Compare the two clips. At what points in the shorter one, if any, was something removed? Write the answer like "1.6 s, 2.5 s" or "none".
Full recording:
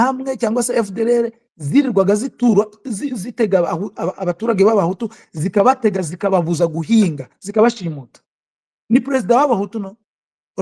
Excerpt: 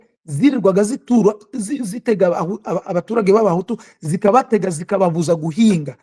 none